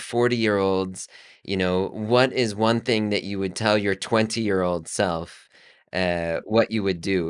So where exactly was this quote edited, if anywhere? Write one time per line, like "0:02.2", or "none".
none